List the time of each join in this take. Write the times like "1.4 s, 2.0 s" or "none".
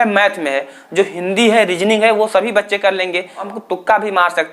3.5 s